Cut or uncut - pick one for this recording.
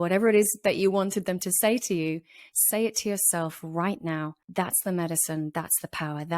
cut